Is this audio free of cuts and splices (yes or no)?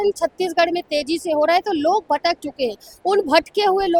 yes